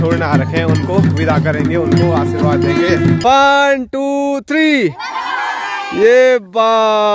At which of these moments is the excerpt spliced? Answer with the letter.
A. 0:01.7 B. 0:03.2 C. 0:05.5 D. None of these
B